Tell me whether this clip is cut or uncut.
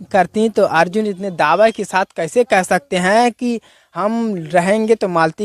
uncut